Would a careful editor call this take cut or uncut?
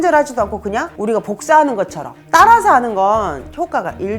uncut